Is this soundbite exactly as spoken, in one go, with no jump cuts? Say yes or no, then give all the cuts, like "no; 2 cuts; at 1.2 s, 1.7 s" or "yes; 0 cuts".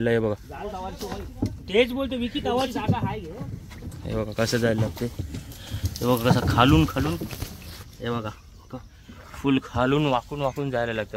yes; 0 cuts